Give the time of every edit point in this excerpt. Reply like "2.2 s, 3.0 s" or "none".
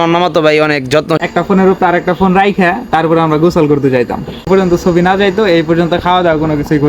1.2 s, 4.5 s